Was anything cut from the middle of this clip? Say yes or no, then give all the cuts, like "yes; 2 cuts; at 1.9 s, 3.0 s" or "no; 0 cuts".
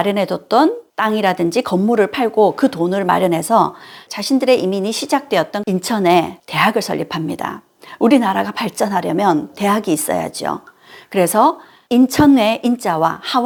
no; 0 cuts